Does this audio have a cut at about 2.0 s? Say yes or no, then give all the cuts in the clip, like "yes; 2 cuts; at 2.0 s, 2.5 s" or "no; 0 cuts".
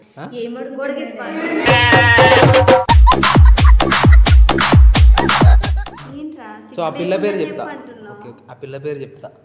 no; 0 cuts